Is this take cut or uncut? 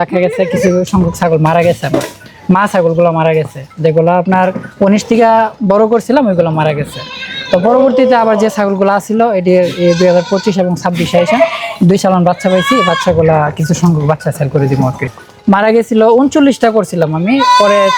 cut